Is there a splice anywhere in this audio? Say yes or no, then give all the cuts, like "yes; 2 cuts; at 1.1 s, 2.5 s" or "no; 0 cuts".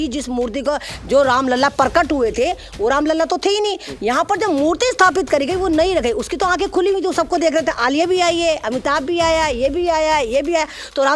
no; 0 cuts